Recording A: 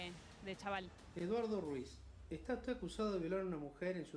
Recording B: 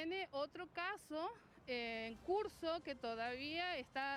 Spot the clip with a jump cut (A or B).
A